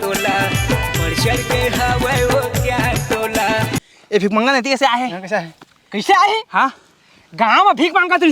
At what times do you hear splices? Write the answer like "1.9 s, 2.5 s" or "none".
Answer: 3.8 s